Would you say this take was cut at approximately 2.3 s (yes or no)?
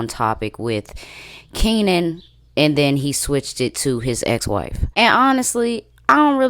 no